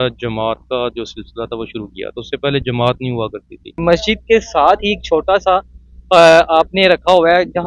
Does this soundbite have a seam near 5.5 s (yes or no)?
no